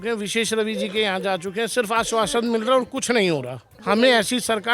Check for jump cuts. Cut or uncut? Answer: cut